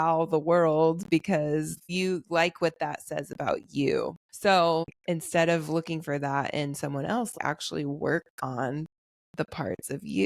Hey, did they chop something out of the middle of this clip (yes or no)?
yes